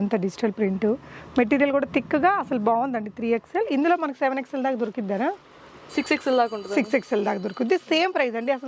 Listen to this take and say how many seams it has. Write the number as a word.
zero